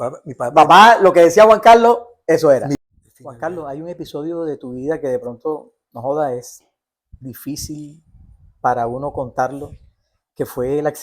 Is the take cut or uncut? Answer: cut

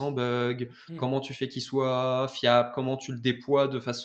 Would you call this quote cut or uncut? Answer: uncut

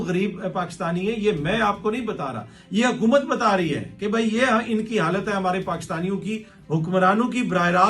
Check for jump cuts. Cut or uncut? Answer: cut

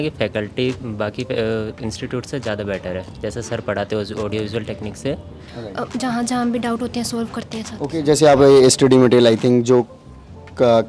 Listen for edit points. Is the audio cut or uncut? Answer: cut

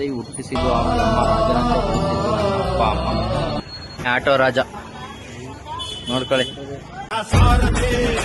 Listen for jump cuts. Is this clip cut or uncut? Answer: cut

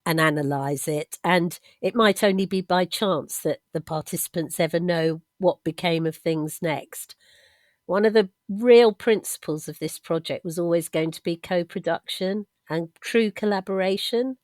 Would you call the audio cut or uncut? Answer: cut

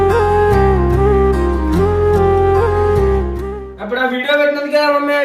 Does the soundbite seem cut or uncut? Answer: uncut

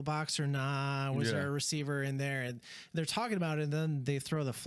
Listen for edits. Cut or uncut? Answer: uncut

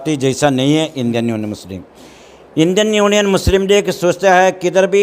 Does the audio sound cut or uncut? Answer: uncut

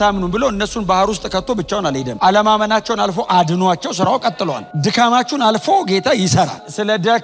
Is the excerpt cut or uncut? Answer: uncut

